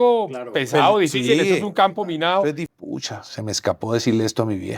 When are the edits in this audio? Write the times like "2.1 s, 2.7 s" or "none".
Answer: 2.6 s